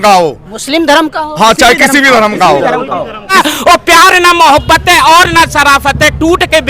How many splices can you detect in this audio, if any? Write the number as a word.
one